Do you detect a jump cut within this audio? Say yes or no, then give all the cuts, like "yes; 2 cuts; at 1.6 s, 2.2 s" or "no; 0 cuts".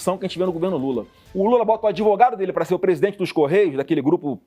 yes; 1 cut; at 1.1 s